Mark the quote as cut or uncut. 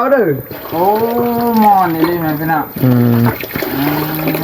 uncut